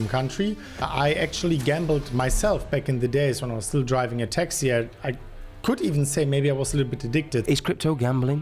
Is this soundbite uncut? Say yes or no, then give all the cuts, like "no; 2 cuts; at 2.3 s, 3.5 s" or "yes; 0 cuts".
no; 2 cuts; at 0.9 s, 7.4 s